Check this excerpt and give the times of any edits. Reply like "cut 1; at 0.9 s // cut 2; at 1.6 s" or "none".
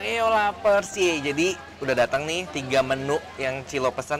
none